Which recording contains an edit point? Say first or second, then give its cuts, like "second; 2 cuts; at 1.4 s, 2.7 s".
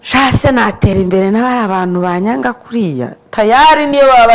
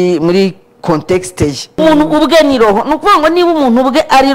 second; 1 cut; at 1.8 s